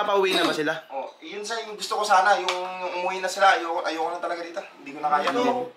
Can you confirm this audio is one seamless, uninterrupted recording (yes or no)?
yes